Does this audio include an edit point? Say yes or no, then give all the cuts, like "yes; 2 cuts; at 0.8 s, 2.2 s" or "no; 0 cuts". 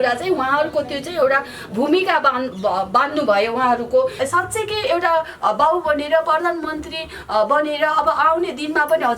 yes; 1 cut; at 4.2 s